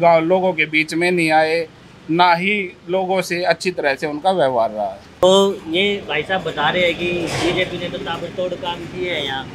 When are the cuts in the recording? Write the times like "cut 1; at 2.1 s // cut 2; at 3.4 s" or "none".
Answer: cut 1; at 5.2 s